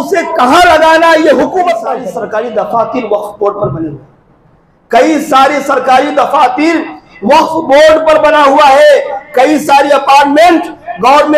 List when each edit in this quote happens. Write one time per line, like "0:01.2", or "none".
0:02.0